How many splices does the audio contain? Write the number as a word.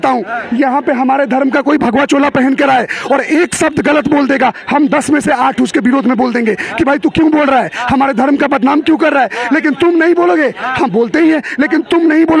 zero